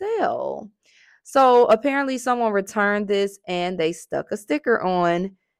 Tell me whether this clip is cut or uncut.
uncut